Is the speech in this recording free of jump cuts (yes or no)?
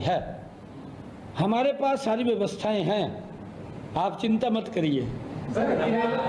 yes